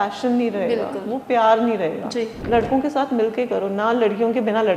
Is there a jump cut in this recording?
yes; 1 cut; at 2.4 s

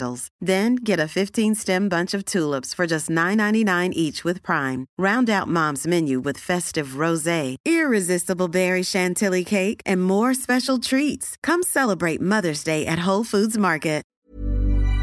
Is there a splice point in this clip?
yes; 1 cut; at 14.1 s

